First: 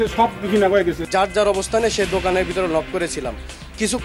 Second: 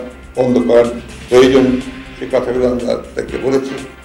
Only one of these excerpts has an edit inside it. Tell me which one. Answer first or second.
first